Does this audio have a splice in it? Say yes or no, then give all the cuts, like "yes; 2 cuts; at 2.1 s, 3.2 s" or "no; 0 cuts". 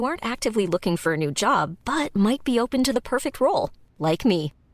no; 0 cuts